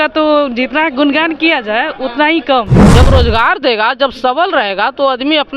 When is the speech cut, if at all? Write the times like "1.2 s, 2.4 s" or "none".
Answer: 2.8 s